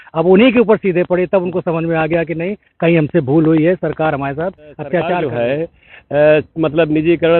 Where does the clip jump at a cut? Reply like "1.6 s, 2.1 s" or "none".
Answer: 5.3 s